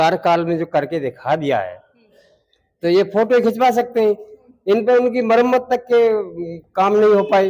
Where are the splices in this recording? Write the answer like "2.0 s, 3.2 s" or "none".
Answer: none